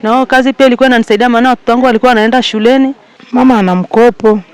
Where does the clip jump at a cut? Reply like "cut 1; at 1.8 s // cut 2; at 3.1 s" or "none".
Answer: cut 1; at 3.2 s